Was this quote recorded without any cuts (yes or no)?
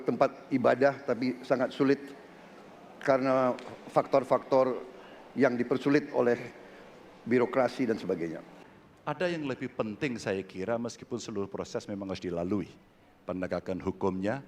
no